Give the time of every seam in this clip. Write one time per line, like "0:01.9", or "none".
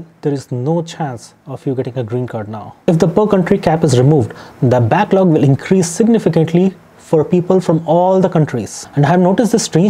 0:02.7
0:08.7

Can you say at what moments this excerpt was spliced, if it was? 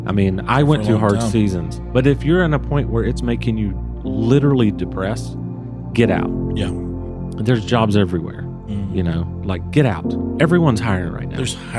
none

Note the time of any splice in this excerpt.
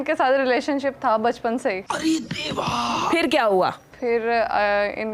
0:03.0

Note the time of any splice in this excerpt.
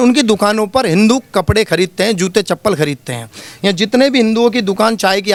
none

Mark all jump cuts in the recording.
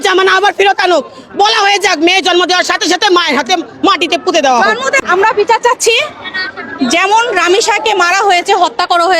0:04.9
0:08.2

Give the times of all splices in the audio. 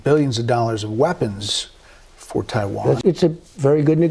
0:03.0

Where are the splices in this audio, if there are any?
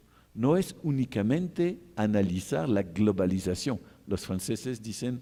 none

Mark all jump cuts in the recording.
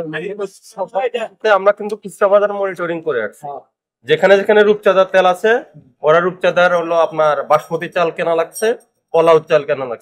0:01.4

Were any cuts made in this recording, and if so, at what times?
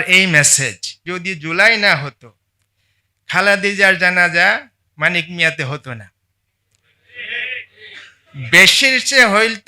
0:01.0

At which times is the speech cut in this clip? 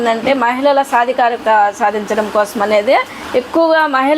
0:01.4
0:03.2

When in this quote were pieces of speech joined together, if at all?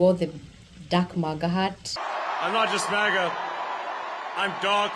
0:01.9

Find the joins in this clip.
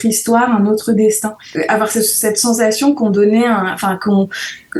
0:01.4

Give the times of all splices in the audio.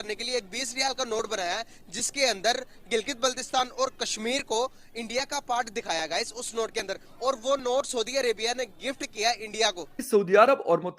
0:10.0

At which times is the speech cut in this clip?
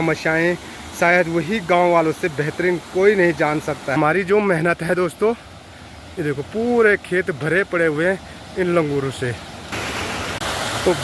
0:04.0
0:10.1

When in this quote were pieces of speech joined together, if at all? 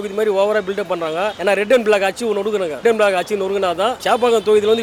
none

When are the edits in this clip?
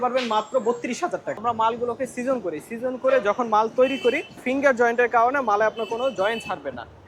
0:01.4
0:04.4

